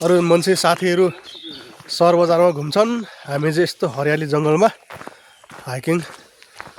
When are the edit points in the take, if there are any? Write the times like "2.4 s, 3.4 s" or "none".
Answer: none